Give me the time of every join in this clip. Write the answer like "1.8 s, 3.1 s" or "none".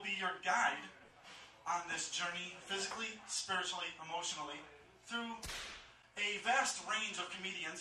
6.2 s